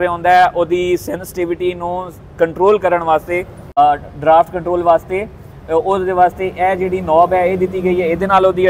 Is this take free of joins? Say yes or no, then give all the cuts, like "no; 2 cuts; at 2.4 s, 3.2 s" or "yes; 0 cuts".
no; 1 cut; at 3.8 s